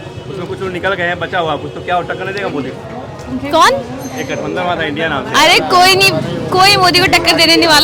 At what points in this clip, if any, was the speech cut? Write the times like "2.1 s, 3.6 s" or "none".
none